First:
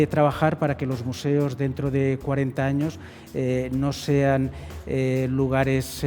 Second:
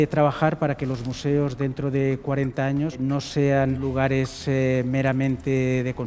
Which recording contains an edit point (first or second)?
second